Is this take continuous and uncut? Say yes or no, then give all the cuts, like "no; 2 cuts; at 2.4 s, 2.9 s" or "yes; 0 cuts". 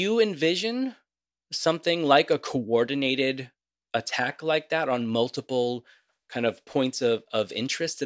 yes; 0 cuts